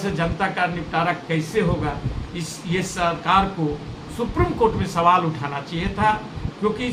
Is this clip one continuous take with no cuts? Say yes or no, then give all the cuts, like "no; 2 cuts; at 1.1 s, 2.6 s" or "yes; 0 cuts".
yes; 0 cuts